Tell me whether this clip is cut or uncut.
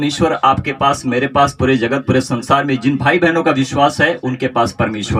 uncut